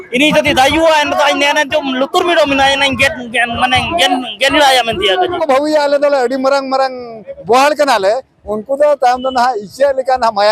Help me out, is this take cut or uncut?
cut